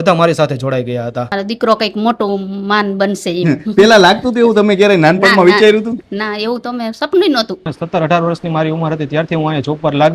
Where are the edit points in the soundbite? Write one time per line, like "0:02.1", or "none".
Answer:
0:01.3
0:07.6